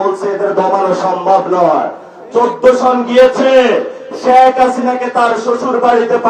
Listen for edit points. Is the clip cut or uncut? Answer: uncut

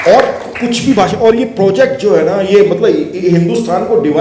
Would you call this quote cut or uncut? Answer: uncut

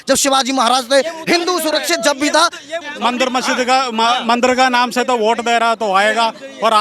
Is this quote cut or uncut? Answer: cut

